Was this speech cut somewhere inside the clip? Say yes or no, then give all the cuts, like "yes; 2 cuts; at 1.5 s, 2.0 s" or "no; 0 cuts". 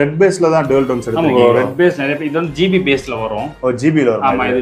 no; 0 cuts